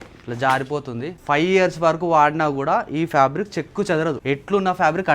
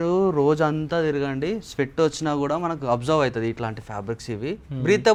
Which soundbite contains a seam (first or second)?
first